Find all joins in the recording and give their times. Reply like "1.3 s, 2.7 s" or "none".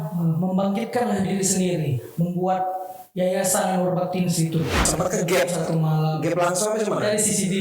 4.8 s